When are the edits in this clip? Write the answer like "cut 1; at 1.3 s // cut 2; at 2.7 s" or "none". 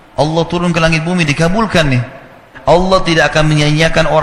cut 1; at 2.5 s